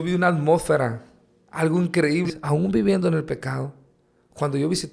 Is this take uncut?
no; 1 cut; at 2.3 s

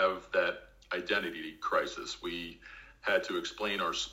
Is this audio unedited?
yes; 0 cuts

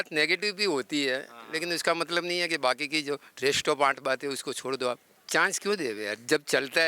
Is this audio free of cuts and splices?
no; 1 cut; at 5.2 s

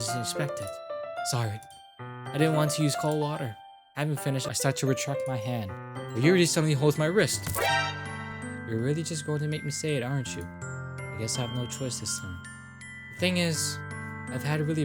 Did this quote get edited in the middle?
yes; 2 cuts; at 4.5 s, 8.0 s

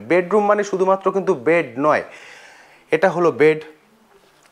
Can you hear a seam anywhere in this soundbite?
no; 0 cuts

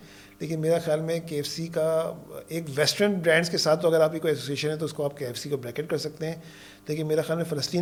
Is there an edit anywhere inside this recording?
no; 0 cuts

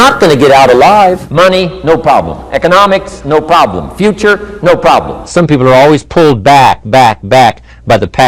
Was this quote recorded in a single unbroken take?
no; 2 cuts; at 1.2 s, 5.3 s

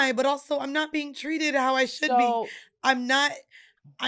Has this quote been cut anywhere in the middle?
no; 0 cuts

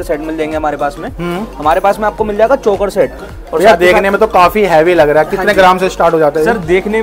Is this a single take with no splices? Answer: yes; 0 cuts

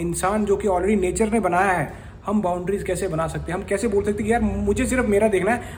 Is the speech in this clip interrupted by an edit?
no; 0 cuts

